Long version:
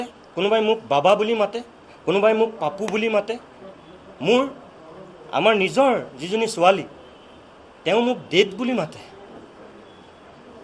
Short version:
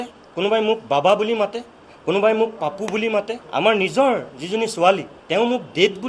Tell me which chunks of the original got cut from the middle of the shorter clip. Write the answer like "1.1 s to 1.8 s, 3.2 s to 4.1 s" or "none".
3.4 s to 5.2 s, 6.9 s to 7.7 s